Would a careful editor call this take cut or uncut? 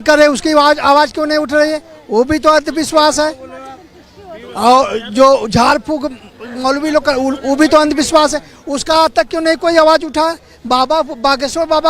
uncut